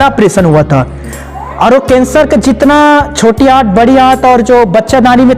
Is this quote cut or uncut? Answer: uncut